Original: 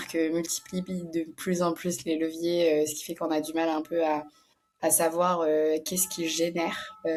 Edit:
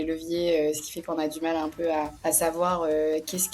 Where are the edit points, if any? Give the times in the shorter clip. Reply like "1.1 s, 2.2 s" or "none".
2.1 s